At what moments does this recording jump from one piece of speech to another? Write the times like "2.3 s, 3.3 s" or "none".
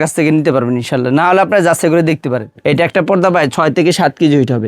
2.5 s